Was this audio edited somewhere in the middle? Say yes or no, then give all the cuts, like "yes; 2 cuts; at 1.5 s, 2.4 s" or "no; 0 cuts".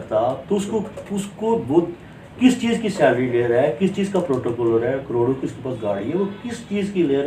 no; 0 cuts